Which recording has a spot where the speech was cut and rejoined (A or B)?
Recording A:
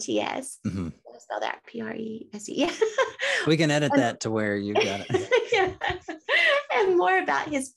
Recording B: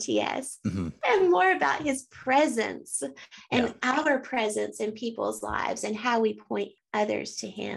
B